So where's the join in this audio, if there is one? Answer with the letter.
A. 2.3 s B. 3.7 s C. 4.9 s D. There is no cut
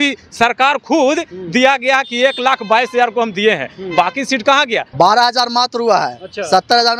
C